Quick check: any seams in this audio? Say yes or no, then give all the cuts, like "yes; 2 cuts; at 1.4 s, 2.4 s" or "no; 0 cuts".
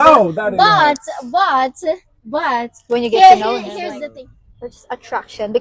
yes; 1 cut; at 3.9 s